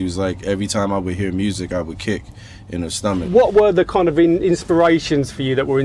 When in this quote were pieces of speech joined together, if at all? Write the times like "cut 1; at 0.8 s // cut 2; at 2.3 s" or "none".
cut 1; at 3.2 s